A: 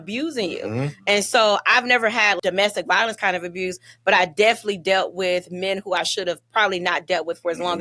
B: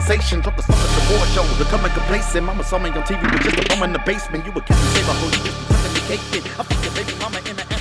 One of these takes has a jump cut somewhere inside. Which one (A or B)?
A